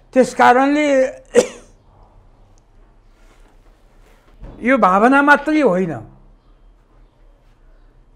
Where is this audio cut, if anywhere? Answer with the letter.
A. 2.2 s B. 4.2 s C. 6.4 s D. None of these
B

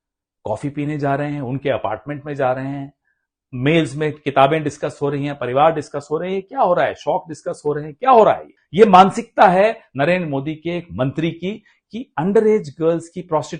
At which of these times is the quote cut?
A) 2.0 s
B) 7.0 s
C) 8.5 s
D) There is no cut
C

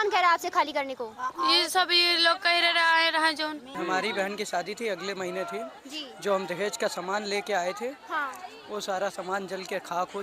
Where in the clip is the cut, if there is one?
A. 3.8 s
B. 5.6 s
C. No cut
A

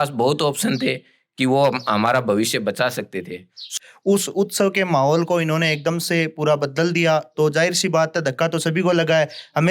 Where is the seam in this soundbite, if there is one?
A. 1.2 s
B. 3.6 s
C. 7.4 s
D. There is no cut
B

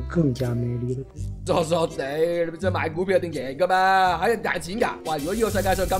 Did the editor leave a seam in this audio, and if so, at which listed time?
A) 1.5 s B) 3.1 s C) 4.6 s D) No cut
A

